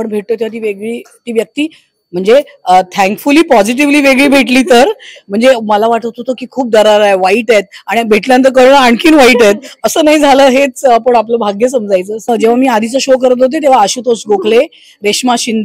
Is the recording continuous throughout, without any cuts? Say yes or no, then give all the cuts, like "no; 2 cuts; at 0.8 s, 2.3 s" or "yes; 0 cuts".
no; 1 cut; at 12.3 s